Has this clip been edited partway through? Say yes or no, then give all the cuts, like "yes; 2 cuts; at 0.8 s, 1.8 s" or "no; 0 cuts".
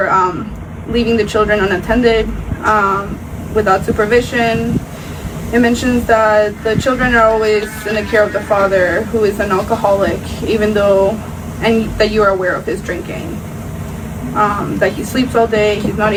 no; 0 cuts